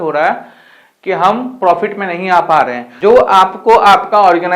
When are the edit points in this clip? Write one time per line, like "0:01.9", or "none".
0:02.8

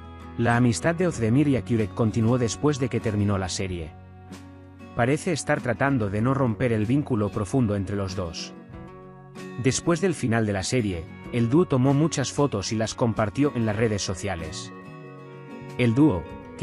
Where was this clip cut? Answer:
0:14.4
0:15.8

